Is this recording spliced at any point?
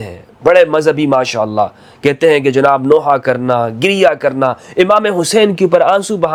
no; 0 cuts

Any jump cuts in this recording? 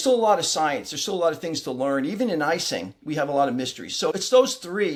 no; 0 cuts

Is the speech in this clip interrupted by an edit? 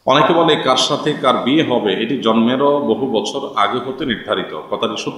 no; 0 cuts

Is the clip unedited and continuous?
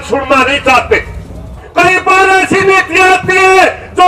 no; 1 cut; at 1.6 s

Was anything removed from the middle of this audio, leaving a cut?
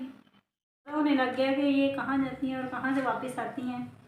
yes; 1 cut; at 1.0 s

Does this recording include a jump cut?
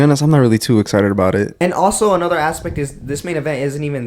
yes; 1 cut; at 1.6 s

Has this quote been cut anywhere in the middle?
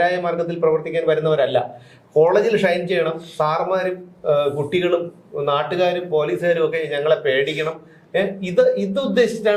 no; 0 cuts

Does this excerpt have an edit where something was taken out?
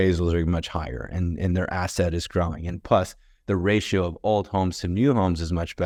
no; 0 cuts

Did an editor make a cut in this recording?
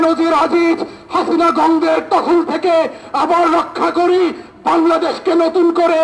no; 0 cuts

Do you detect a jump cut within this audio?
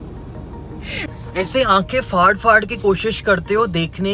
yes; 1 cut; at 1.1 s

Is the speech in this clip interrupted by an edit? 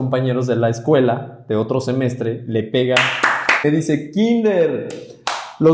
yes; 1 cut; at 3.6 s

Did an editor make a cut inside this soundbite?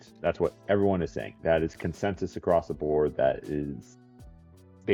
no; 0 cuts

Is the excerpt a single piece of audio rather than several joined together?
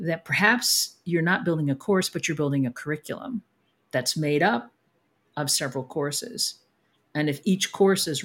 yes; 0 cuts

